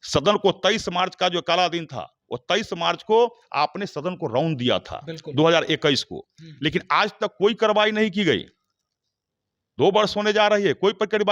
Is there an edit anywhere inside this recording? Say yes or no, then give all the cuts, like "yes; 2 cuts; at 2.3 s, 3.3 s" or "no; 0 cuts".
no; 0 cuts